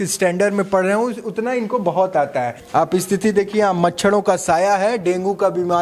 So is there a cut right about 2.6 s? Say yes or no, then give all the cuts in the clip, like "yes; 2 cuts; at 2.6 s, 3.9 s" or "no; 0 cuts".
yes; 1 cut; at 2.6 s